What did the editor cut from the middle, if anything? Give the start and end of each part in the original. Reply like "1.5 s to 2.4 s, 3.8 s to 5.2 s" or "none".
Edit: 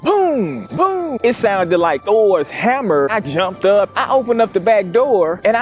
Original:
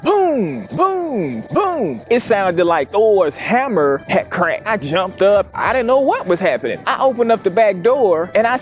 1.1 s to 2.0 s, 4.0 s to 4.7 s, 5.5 s to 6.9 s